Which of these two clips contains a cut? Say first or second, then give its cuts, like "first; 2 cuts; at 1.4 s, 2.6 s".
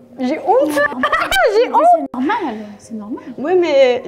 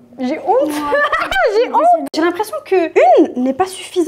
second; 1 cut; at 2.1 s